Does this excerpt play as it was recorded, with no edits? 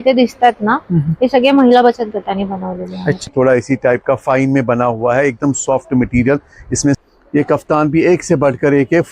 no; 2 cuts; at 3.3 s, 7.0 s

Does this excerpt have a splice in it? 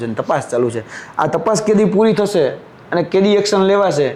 no; 0 cuts

